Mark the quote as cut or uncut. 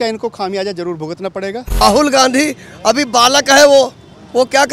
cut